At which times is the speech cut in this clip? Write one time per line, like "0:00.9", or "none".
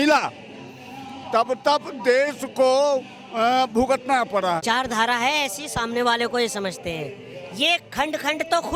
0:04.6